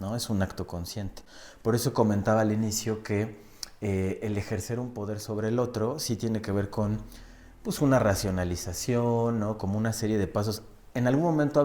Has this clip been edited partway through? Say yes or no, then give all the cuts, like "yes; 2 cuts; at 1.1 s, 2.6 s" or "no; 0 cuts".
no; 0 cuts